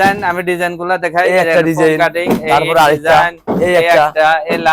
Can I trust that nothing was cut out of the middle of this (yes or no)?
yes